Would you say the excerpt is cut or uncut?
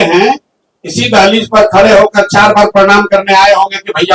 uncut